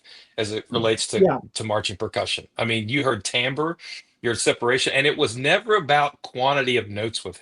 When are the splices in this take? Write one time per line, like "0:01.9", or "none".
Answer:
none